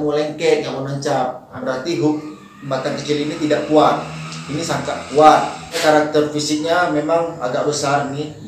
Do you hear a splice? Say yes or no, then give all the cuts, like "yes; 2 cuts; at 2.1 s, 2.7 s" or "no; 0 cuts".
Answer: yes; 2 cuts; at 1.6 s, 5.8 s